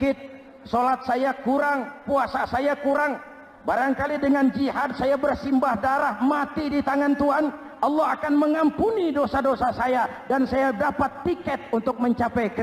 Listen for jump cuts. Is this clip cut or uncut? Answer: uncut